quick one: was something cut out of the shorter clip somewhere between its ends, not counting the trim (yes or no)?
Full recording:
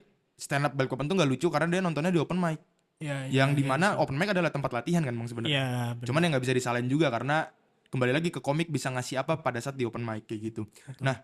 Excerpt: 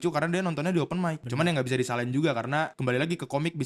yes